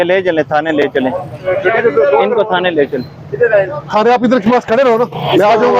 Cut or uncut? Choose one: uncut